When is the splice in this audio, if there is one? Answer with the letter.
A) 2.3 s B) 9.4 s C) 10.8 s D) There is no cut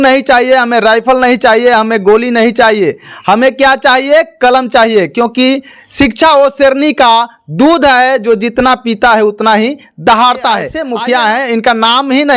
C